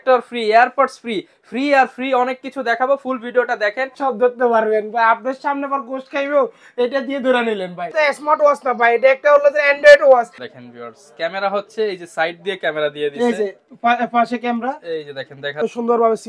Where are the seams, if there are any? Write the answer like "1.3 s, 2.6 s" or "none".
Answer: 3.9 s, 7.9 s, 10.4 s, 15.6 s